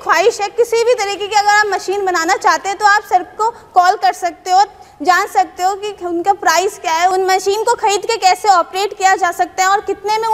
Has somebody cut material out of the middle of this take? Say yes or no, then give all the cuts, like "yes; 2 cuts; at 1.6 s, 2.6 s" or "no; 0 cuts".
no; 0 cuts